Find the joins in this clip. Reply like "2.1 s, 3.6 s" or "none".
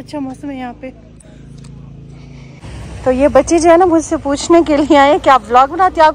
2.7 s